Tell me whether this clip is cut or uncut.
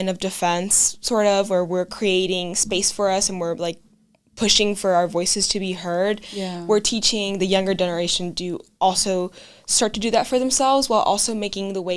uncut